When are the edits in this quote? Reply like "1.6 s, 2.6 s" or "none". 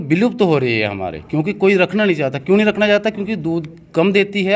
none

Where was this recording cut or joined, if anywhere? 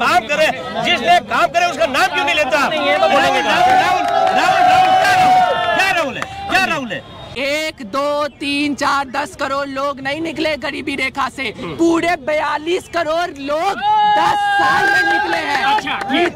7.3 s

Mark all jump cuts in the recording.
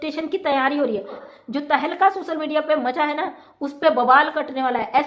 1.2 s

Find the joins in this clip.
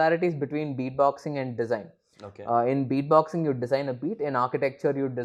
none

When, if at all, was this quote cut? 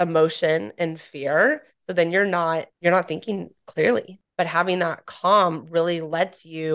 2.7 s, 4.2 s

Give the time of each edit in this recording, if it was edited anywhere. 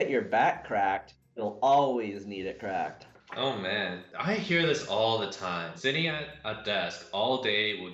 4.1 s, 5.7 s

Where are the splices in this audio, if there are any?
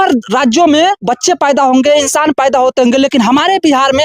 1.0 s

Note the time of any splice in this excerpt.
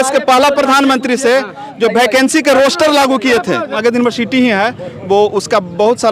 3.7 s

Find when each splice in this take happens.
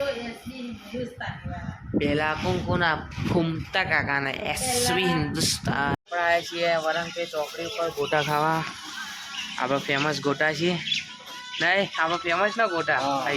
5.9 s

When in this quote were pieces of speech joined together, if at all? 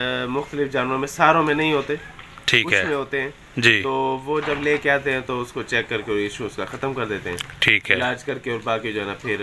none

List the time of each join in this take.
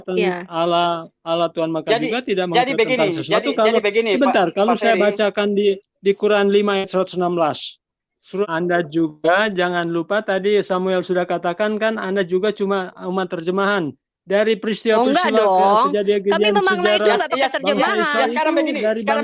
8.4 s

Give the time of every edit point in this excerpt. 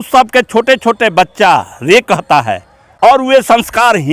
2.8 s

